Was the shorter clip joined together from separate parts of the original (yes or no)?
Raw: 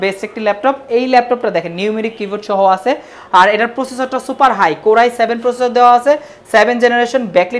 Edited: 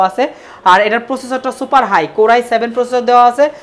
no